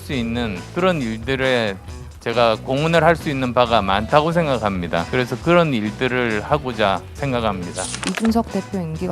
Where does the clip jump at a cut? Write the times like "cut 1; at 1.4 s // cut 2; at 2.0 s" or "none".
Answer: cut 1; at 7.8 s